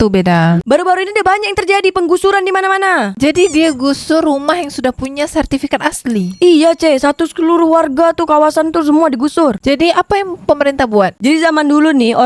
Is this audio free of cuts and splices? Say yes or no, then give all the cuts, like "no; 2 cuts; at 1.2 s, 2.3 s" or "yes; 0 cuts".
yes; 0 cuts